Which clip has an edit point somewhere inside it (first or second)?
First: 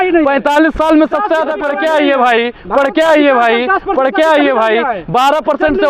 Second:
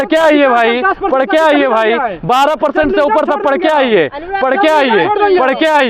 first